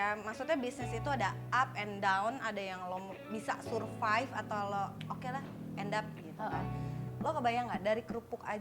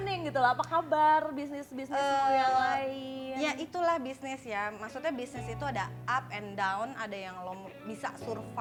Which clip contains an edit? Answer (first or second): first